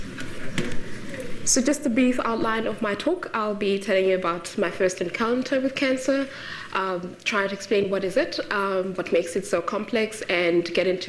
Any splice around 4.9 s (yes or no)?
yes